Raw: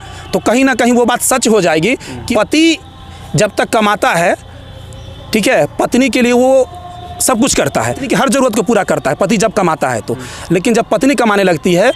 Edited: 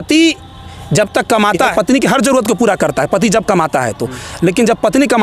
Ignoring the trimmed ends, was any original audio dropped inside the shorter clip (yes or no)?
yes